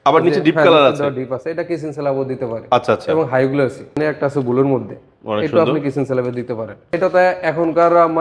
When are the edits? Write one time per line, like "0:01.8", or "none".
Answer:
0:03.9
0:07.0